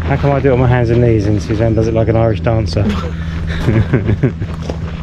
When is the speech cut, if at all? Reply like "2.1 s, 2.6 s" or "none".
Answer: none

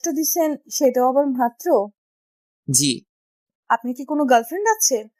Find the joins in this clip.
3.5 s

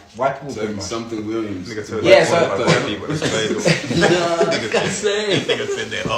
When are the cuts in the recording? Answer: none

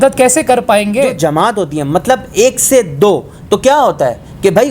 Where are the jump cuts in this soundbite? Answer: 1.1 s

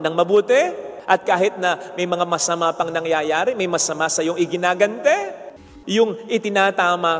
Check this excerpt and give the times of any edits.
5.4 s

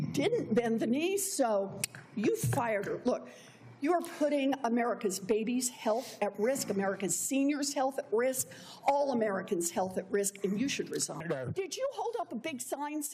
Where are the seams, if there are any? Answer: 11.2 s

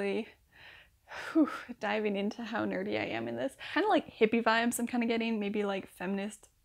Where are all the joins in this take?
3.6 s

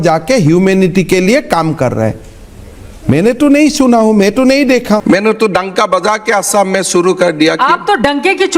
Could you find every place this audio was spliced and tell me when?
5.0 s

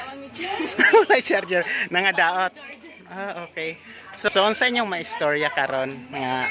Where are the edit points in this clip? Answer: 4.3 s

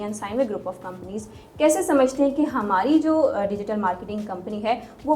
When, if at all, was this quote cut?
none

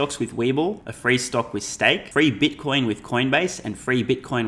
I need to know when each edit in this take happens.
0.9 s, 2.0 s

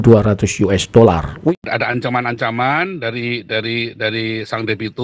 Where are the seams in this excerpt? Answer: 1.5 s

